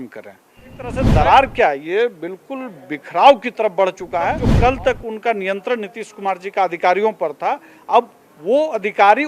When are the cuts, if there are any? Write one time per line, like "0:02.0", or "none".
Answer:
0:01.0
0:04.5